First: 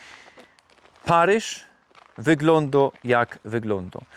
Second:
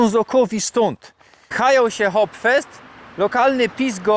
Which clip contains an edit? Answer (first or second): second